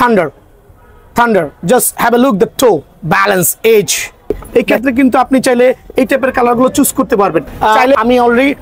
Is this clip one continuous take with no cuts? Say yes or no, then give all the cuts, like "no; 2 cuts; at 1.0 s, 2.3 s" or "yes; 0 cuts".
no; 2 cuts; at 4.4 s, 7.9 s